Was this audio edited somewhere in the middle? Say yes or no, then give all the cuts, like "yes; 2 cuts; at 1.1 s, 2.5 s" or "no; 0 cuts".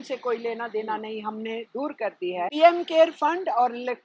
yes; 1 cut; at 2.5 s